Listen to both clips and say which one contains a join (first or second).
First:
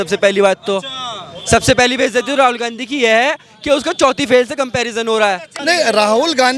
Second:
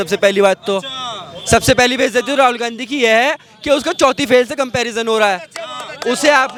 first